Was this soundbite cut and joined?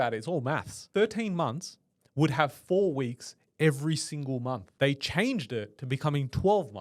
yes; 2 cuts; at 0.8 s, 4.7 s

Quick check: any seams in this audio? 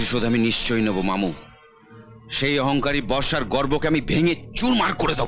no; 0 cuts

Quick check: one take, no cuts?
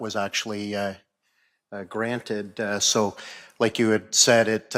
yes; 0 cuts

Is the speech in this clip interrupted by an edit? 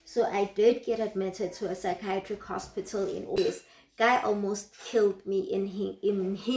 yes; 1 cut; at 3.4 s

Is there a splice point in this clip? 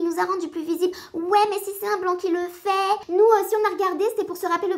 yes; 1 cut; at 3.0 s

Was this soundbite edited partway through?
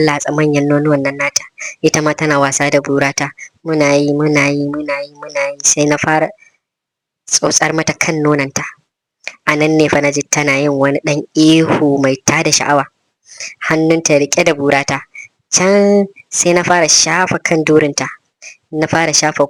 no; 0 cuts

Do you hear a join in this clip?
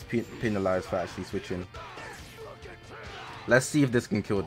yes; 1 cut; at 2.0 s

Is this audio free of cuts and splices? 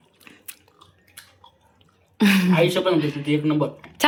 yes; 0 cuts

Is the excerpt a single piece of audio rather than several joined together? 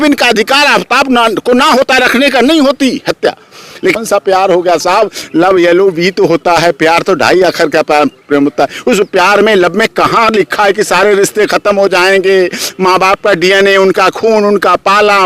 no; 1 cut; at 3.9 s

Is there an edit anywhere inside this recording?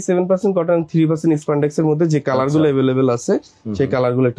no; 0 cuts

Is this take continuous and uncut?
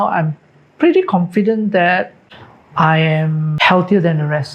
no; 2 cuts; at 2.2 s, 3.5 s

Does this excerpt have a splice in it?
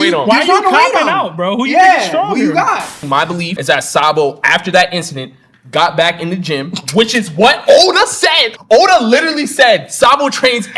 yes; 1 cut; at 3.0 s

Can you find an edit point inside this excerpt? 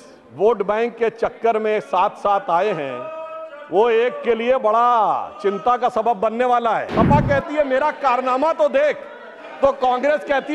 yes; 1 cut; at 6.9 s

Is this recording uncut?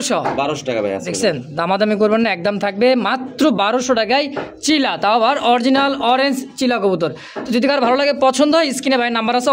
yes; 0 cuts

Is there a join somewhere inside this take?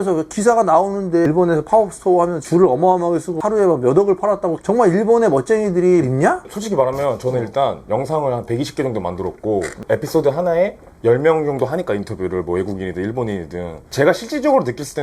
yes; 2 cuts; at 1.2 s, 13.8 s

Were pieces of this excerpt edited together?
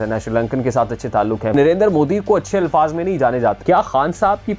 yes; 2 cuts; at 1.5 s, 3.6 s

